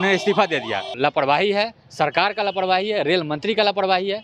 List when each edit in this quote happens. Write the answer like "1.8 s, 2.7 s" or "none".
0.9 s